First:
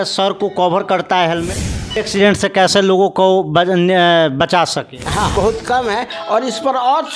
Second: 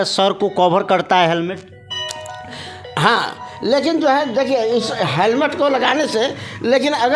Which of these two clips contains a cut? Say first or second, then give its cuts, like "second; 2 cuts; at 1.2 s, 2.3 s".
first; 2 cuts; at 2.0 s, 5.3 s